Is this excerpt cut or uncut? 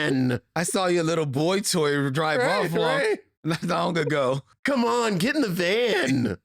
cut